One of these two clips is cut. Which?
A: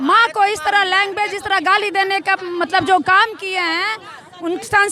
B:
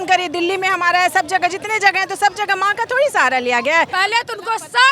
B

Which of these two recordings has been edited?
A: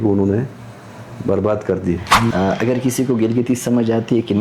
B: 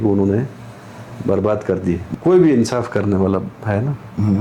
A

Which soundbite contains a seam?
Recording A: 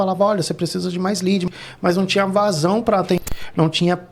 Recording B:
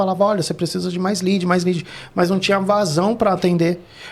A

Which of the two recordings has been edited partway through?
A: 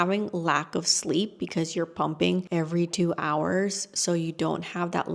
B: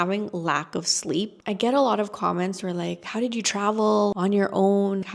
B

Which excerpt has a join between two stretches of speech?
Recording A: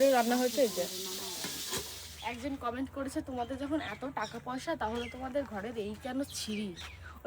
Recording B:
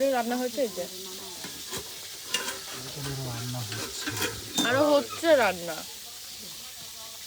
A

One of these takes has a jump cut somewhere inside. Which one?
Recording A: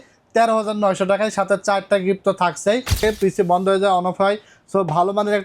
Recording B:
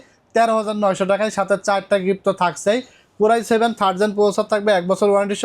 A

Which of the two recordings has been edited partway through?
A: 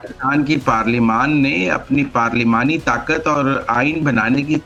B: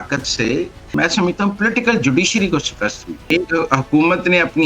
B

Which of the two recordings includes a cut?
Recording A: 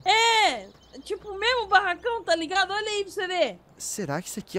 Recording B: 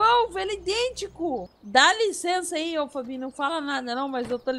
B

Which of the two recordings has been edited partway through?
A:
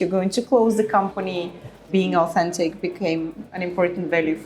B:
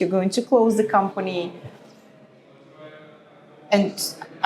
A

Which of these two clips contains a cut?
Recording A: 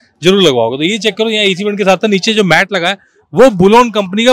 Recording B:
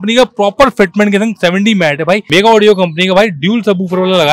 B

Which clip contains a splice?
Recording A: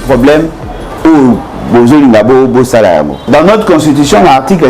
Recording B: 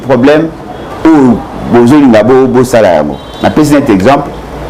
A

